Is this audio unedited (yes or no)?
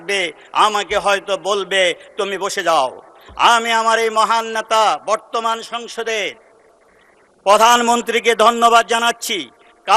yes